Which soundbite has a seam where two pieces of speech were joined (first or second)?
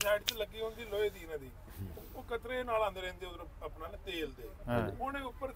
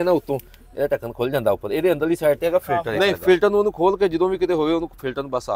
second